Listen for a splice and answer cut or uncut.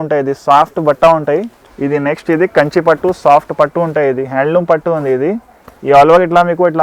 cut